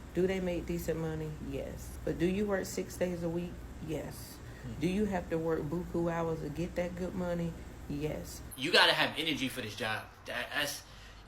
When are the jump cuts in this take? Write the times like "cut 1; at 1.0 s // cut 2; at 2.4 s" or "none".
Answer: cut 1; at 1.9 s // cut 2; at 8.4 s